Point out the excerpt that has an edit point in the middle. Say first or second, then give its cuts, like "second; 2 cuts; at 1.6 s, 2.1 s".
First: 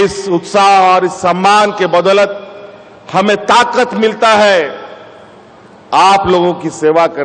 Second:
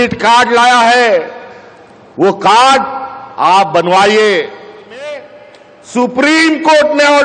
second; 1 cut; at 5.1 s